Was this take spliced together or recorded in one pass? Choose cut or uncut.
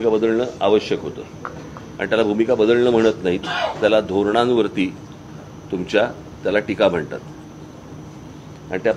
uncut